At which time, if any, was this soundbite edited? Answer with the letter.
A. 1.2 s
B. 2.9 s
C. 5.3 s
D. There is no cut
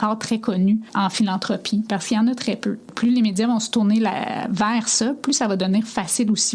B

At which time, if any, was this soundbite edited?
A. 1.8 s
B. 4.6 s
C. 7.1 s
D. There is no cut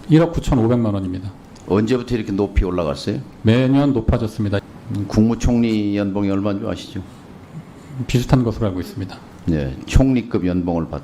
B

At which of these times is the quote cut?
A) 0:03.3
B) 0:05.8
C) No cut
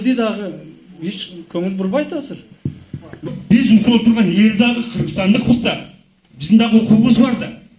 A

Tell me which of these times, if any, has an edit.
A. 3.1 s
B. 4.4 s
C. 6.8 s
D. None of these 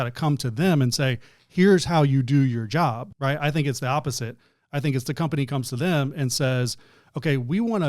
A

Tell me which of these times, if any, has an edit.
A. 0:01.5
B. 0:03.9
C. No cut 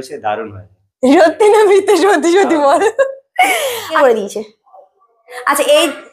B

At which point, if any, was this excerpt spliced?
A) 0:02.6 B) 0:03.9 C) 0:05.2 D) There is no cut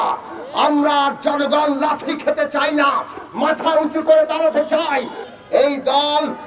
C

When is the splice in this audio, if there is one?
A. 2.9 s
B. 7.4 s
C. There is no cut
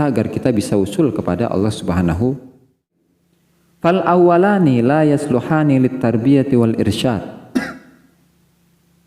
A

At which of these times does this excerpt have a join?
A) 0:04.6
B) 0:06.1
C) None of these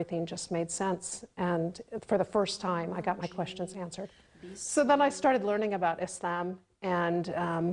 A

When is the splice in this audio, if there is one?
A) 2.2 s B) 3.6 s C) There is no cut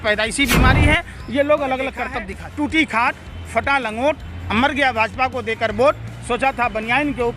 A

